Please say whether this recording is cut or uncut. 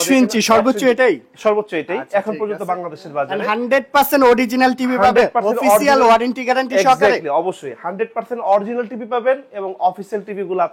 uncut